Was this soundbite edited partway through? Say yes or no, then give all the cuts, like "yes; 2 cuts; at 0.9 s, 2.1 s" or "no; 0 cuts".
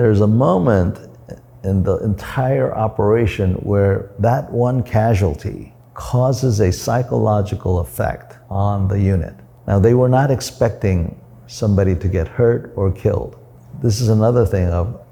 no; 0 cuts